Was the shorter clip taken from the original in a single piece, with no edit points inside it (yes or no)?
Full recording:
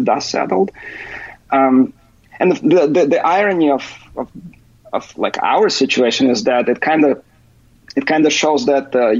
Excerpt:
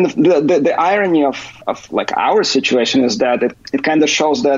no